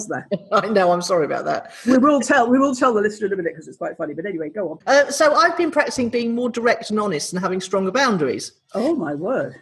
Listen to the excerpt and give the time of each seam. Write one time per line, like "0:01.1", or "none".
0:04.8

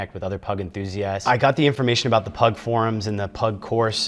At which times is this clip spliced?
0:01.2

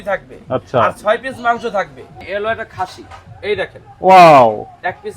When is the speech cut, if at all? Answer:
0:02.1

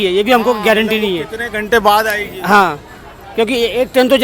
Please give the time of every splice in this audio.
none

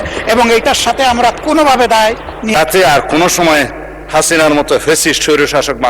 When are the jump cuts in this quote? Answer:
0:02.5

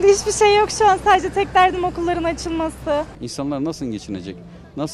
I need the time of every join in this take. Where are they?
0:03.2

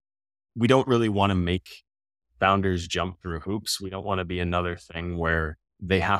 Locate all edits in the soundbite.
none

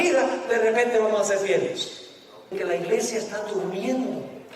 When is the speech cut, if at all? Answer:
0:02.5

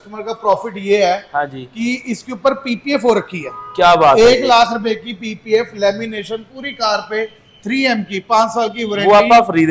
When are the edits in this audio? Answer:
none

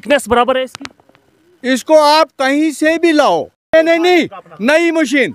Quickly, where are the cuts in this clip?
0:03.7

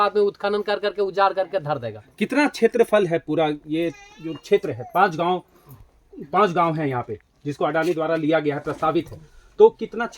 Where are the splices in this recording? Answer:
none

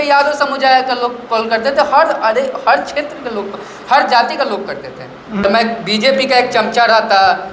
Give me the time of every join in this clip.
0:05.4

